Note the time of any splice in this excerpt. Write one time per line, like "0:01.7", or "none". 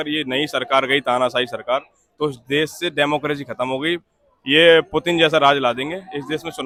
none